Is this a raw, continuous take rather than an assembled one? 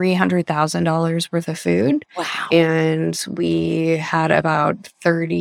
yes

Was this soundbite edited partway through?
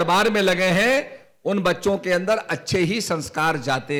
no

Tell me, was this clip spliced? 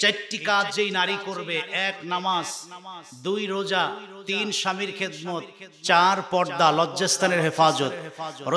no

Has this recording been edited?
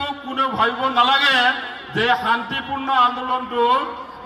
no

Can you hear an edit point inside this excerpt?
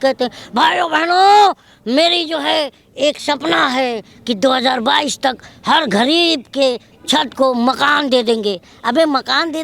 no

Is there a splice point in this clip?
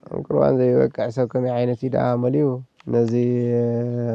yes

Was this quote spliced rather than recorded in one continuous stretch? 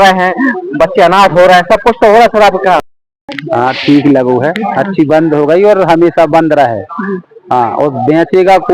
yes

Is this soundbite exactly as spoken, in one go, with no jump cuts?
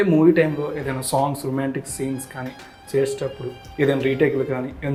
yes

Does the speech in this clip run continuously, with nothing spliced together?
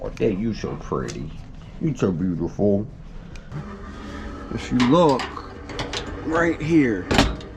no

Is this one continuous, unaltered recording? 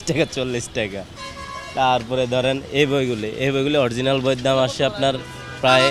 yes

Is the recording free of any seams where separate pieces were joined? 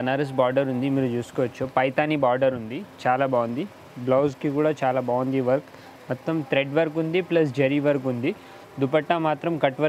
yes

